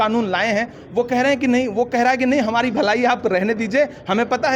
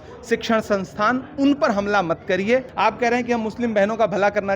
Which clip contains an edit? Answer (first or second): second